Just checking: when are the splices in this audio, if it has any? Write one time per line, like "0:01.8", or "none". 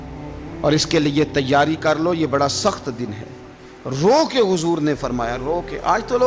none